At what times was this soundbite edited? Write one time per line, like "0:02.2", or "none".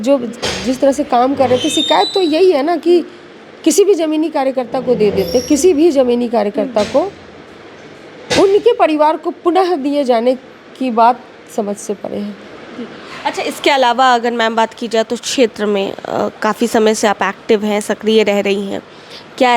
none